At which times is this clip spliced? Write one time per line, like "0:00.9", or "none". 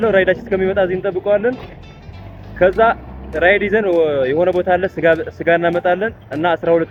none